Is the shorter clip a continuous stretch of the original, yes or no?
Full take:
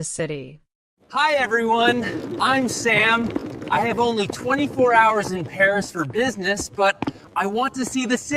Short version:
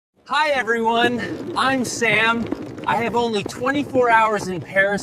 yes